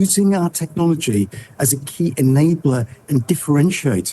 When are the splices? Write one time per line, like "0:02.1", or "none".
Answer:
none